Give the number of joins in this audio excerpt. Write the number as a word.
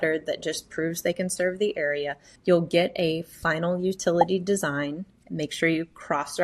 one